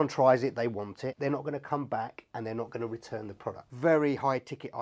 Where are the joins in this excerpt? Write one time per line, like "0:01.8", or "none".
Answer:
0:01.2
0:03.7